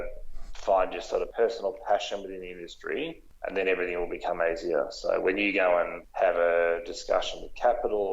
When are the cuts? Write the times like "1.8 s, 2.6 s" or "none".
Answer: 1.3 s, 3.3 s, 6.0 s